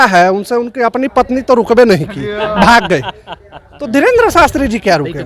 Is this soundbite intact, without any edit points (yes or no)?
yes